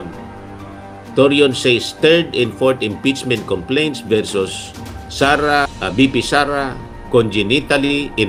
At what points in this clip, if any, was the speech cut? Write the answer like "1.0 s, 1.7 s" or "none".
none